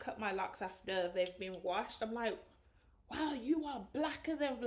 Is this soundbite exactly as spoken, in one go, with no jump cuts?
yes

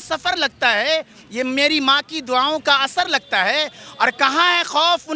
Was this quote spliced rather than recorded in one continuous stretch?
no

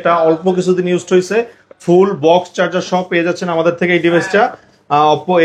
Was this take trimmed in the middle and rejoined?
no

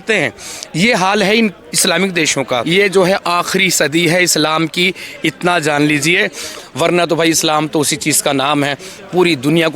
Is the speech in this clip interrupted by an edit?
yes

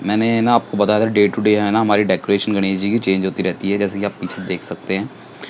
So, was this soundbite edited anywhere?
no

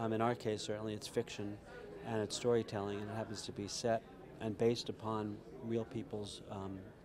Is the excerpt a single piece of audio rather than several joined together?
yes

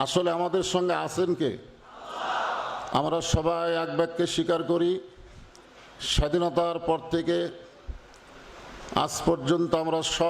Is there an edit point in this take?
no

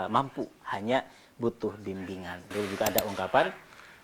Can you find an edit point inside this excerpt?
yes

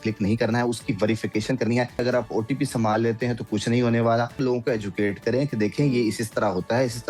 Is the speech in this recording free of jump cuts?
no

